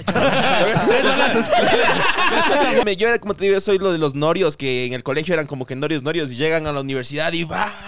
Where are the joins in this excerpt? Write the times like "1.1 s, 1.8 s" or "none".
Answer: 2.8 s